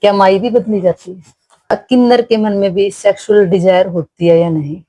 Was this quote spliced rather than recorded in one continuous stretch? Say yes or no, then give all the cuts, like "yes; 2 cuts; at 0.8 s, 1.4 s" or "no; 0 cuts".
yes; 1 cut; at 1.7 s